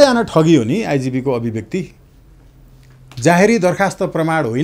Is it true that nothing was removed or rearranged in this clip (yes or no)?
yes